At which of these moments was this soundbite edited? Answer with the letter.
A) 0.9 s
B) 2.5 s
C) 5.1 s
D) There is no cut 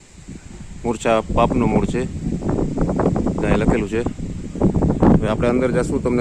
D